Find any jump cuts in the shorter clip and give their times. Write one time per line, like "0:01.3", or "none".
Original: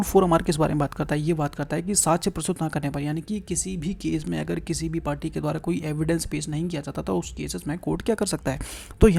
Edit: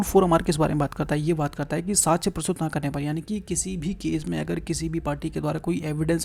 none